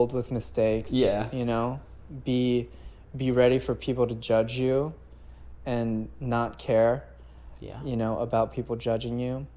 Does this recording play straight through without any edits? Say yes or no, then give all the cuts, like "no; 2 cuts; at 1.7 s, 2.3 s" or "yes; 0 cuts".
yes; 0 cuts